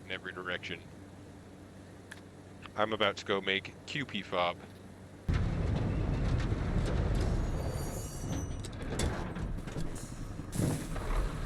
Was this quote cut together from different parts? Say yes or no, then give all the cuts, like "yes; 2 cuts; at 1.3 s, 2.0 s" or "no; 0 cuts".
no; 0 cuts